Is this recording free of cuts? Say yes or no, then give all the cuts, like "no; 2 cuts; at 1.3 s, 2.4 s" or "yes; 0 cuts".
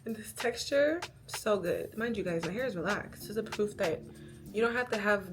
no; 2 cuts; at 1.9 s, 3.1 s